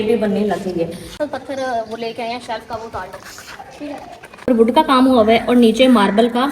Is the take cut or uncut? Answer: cut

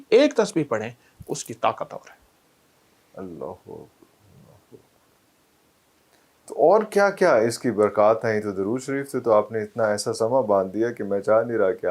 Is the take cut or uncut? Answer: uncut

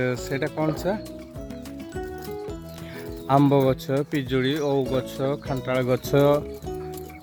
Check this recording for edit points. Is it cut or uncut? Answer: uncut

